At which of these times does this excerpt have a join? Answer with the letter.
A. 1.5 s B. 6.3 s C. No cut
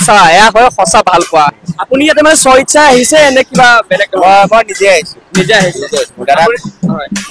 A